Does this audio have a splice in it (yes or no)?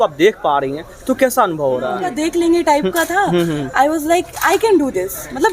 yes